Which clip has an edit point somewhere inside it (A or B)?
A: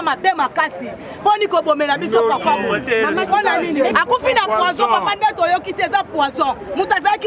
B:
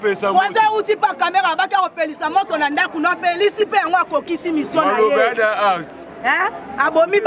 A